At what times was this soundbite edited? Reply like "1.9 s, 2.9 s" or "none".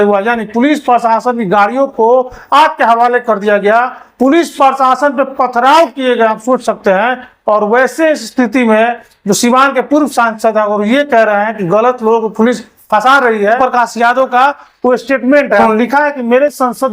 13.6 s, 15.6 s